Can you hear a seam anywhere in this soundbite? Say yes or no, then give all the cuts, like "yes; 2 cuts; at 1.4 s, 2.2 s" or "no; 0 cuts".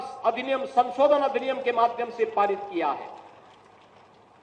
no; 0 cuts